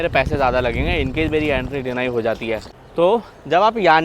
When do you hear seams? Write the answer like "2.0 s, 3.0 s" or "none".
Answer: 2.7 s